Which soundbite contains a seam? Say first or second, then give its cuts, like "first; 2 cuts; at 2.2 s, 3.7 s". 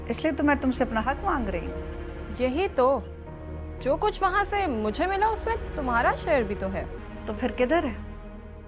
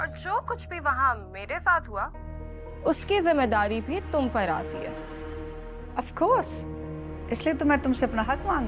first; 1 cut; at 7.0 s